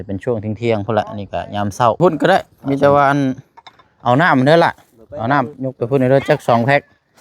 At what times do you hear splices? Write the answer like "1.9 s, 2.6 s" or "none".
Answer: 2.0 s